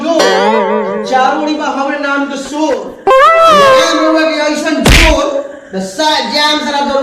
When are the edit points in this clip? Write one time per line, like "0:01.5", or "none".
none